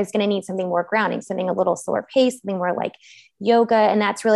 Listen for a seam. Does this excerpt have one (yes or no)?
no